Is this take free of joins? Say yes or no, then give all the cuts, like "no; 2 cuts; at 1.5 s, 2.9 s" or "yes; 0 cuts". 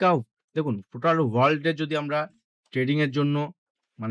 yes; 0 cuts